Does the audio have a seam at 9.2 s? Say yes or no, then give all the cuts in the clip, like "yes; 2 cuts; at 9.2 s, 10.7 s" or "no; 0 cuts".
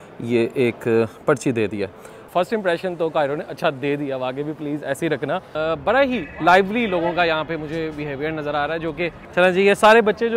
yes; 3 cuts; at 2.3 s, 5.5 s, 9.2 s